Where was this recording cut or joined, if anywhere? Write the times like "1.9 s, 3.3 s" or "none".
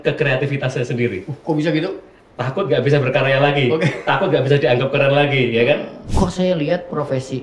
6.0 s